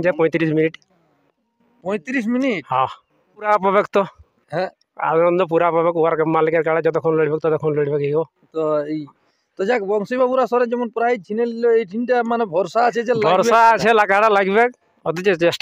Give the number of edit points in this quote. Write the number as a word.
two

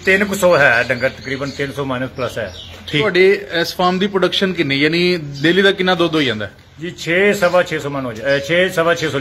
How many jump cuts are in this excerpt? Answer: one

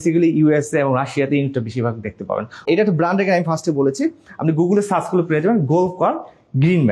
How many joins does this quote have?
one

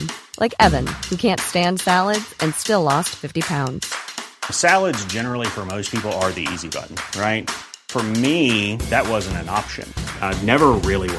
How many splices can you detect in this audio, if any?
zero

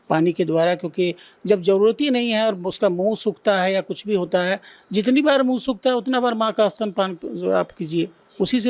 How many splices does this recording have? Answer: zero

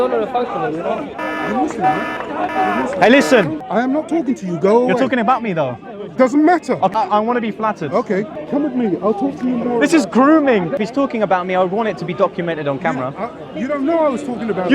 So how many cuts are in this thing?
four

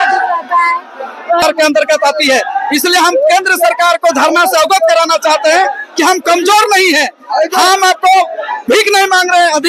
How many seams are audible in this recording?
one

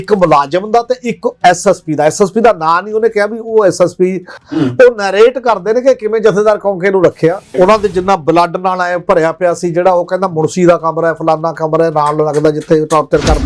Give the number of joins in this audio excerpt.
two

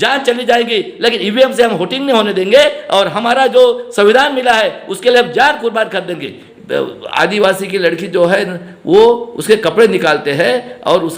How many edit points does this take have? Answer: one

